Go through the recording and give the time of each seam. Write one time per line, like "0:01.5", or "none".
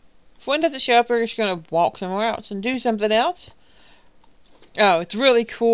0:01.8